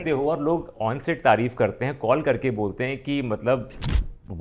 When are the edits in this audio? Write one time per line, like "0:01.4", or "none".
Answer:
none